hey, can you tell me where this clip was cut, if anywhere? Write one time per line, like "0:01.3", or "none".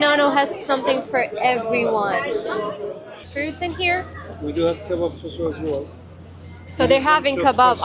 0:03.3